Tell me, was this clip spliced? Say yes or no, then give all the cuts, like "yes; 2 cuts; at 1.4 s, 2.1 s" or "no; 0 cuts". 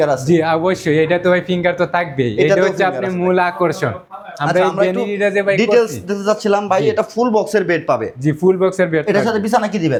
no; 0 cuts